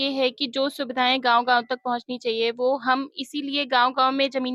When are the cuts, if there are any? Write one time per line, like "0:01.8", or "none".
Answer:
none